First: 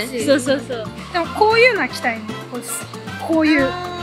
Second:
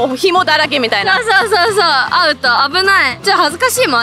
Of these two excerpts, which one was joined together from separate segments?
first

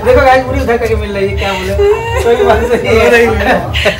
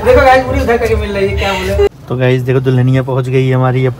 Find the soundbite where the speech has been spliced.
second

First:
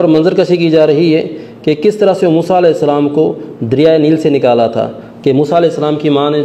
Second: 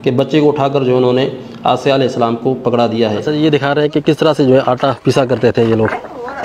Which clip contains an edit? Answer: second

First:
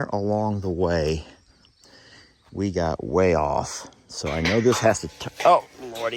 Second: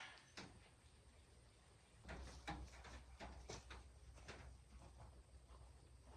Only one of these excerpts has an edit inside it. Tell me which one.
second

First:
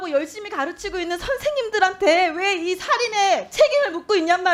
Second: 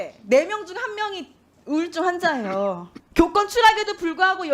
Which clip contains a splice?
second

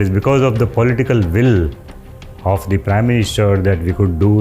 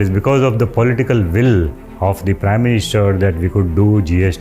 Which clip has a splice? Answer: second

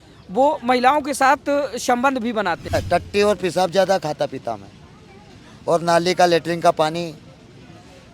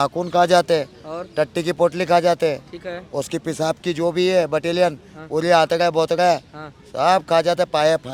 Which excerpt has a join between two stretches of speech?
first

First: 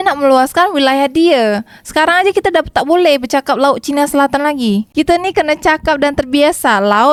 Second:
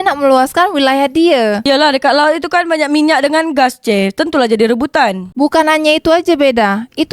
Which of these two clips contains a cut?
second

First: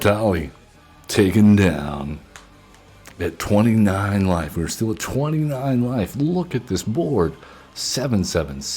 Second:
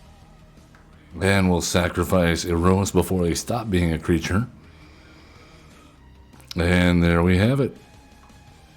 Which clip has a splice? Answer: second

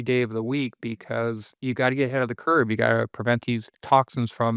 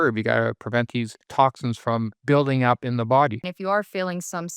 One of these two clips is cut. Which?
second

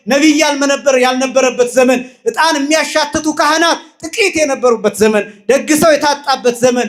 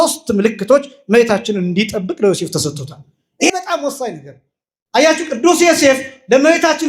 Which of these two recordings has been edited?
second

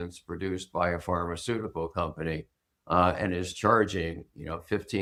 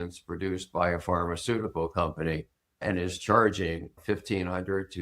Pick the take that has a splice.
second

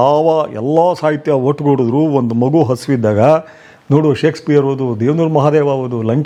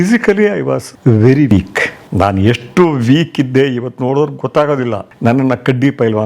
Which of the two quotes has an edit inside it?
second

